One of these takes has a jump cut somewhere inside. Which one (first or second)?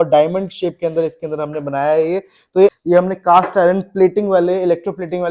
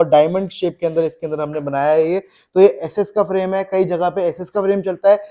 first